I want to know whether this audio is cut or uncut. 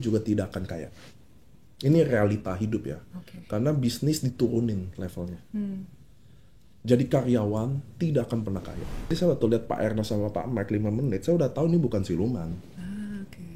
cut